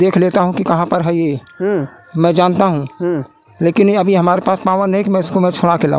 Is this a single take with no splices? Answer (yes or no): yes